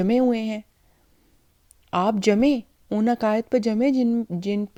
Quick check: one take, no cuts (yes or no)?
yes